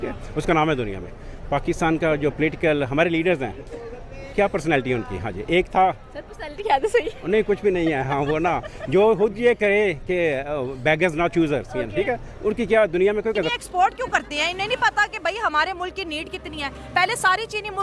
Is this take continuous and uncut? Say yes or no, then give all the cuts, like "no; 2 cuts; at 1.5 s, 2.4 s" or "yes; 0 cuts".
no; 1 cut; at 13.5 s